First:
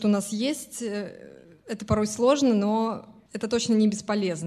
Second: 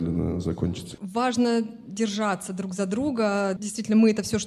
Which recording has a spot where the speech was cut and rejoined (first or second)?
second